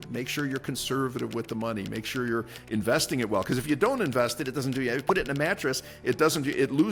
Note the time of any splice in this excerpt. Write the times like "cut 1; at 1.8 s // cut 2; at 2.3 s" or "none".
none